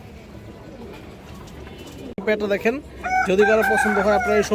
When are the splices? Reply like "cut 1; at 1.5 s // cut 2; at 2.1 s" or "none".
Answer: cut 1; at 2.2 s

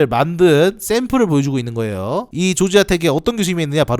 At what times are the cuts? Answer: cut 1; at 2.3 s

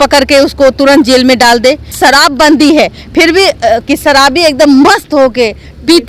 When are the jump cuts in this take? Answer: cut 1; at 1.9 s // cut 2; at 3.8 s

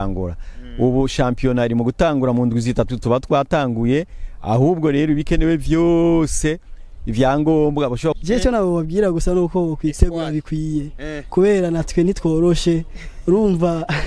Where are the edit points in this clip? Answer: cut 1; at 8.2 s

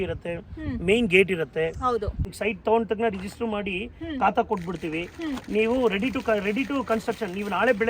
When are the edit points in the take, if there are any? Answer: cut 1; at 2.3 s

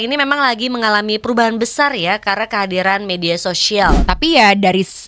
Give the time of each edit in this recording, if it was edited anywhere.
cut 1; at 4.1 s

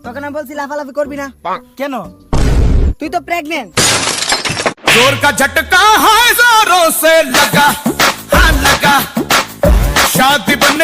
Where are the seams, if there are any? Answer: none

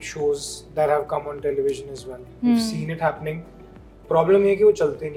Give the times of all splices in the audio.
none

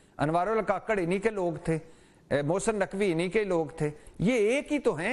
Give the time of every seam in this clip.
none

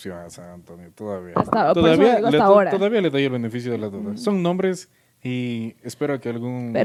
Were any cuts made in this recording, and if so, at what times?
none

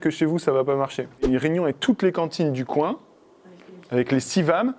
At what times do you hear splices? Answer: cut 1; at 1.2 s

